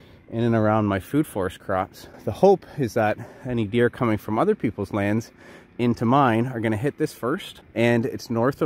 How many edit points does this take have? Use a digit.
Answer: 2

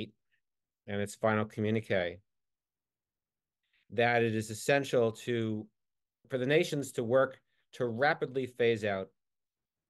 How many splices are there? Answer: 1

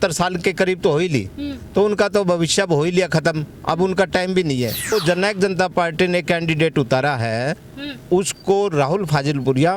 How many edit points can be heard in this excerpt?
1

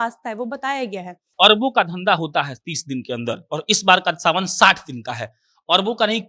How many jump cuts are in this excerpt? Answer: 1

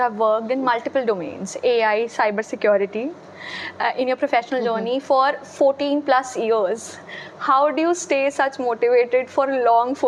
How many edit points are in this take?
0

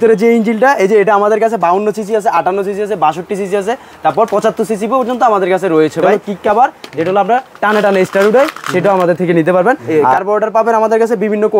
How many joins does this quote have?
2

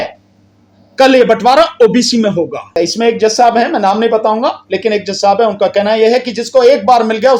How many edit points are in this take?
1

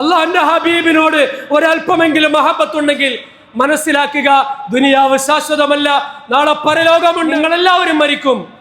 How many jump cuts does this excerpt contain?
1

